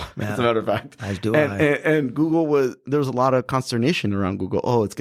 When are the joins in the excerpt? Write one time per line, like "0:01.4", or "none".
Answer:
none